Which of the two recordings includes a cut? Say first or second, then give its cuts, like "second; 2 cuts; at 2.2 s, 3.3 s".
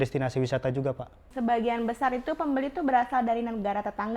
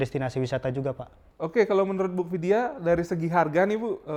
first; 1 cut; at 1.3 s